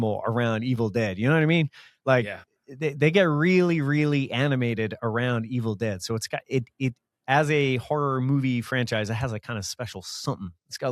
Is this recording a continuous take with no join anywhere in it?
yes; 0 cuts

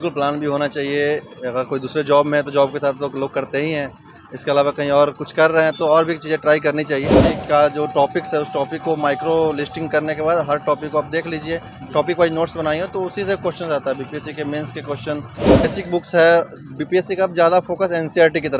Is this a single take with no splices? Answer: no; 2 cuts; at 7.3 s, 15.6 s

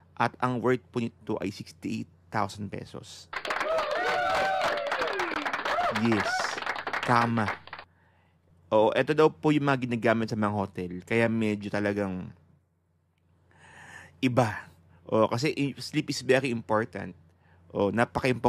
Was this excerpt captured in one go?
yes; 0 cuts

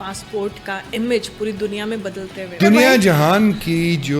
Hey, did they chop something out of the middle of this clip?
yes; 1 cut; at 2.6 s

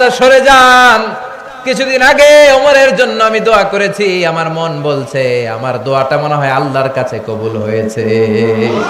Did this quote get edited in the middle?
no; 0 cuts

